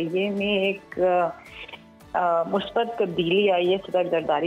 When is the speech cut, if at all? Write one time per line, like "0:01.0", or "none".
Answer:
none